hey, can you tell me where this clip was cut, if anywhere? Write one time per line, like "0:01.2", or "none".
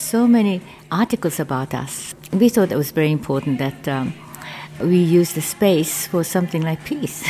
0:02.2
0:04.8